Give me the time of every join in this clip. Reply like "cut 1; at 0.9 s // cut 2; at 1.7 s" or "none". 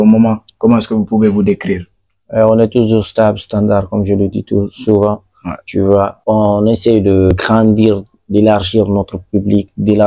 cut 1; at 6.2 s // cut 2; at 7.3 s